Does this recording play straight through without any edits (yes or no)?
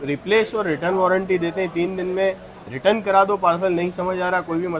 yes